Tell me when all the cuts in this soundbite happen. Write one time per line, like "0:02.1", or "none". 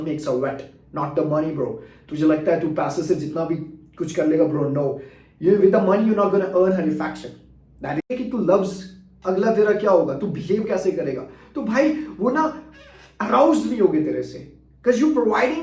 0:08.1